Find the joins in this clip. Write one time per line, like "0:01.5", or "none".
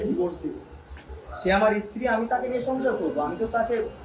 none